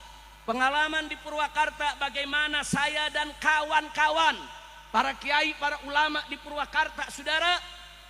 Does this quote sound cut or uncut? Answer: uncut